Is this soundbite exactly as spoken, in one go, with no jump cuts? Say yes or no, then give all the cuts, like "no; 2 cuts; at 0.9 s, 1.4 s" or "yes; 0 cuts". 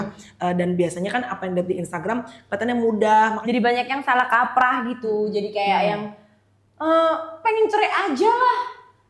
no; 1 cut; at 3.4 s